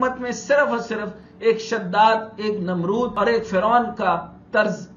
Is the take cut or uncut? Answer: cut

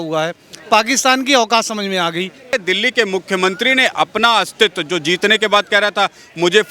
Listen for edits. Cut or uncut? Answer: cut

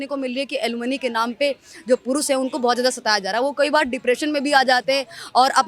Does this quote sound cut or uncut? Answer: uncut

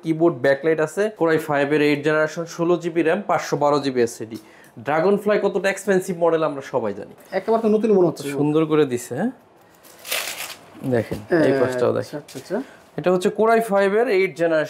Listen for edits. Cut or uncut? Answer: cut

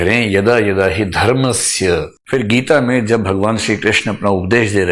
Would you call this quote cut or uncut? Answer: cut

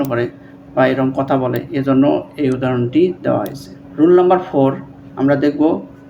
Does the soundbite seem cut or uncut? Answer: uncut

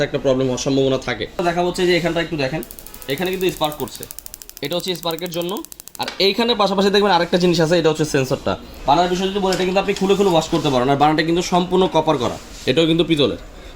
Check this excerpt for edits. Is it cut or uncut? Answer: cut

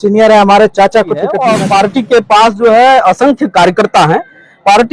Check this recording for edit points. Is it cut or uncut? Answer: cut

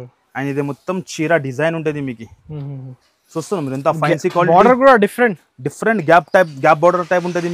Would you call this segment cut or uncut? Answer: uncut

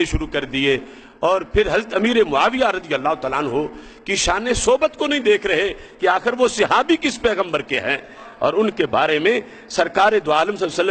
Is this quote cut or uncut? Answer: uncut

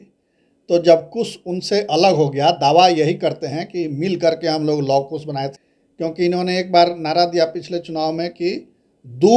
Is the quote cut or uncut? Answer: cut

